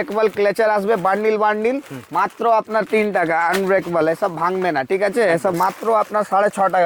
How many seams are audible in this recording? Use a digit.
1